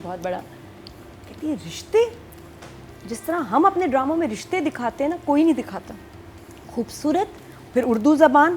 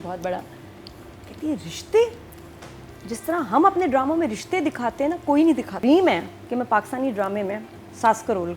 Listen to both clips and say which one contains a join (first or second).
second